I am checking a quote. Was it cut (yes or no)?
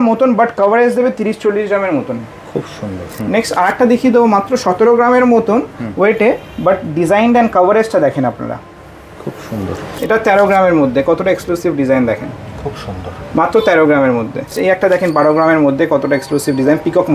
yes